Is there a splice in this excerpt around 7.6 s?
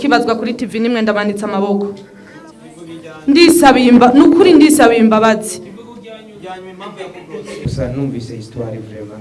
yes; 1 cut; at 7.6 s

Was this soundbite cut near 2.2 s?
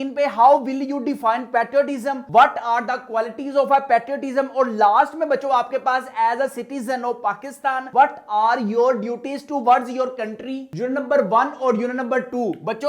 no; 0 cuts

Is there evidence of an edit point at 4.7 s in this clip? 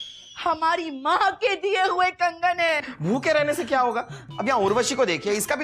no; 1 cut; at 2.9 s

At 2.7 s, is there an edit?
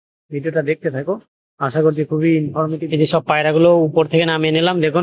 yes; 1 cut; at 2.7 s

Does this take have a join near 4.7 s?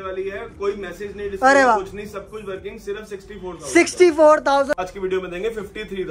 yes; 1 cut; at 4.7 s

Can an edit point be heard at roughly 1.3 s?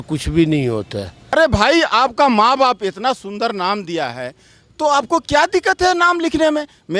yes; 1 cut; at 1.3 s

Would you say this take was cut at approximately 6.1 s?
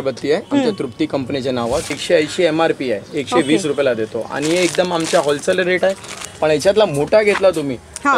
yes; 2 cuts; at 1.9 s, 6.1 s

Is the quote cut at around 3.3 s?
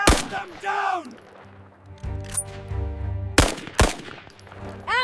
no; 0 cuts

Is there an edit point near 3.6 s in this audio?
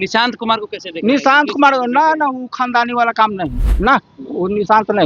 yes; 1 cut; at 3.6 s

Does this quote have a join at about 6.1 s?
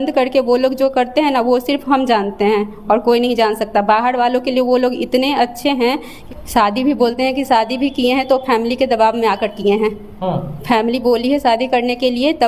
yes; 1 cut; at 6.1 s

